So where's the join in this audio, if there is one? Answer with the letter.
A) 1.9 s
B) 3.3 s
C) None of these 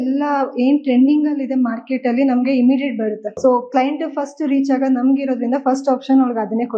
B